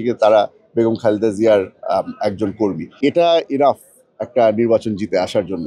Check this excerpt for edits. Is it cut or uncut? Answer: cut